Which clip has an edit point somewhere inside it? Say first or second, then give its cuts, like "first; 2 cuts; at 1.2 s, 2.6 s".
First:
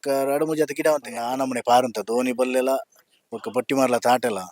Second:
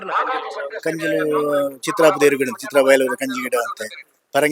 first; 1 cut; at 1.2 s